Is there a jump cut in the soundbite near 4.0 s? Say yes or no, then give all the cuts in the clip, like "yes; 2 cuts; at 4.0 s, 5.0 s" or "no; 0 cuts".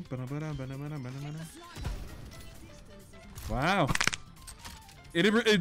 no; 0 cuts